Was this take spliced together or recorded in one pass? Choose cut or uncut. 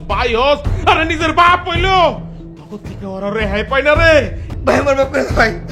cut